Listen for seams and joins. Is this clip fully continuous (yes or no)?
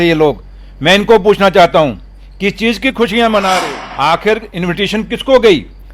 no